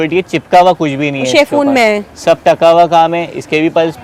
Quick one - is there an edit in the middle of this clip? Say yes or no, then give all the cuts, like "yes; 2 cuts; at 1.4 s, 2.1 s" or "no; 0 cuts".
no; 0 cuts